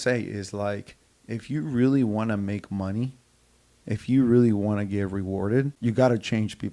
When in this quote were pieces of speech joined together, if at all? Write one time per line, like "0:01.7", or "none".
0:05.7